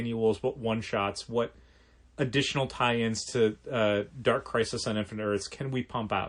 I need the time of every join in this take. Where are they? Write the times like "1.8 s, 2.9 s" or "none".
none